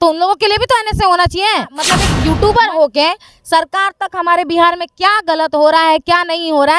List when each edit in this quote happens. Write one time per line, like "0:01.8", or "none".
0:02.0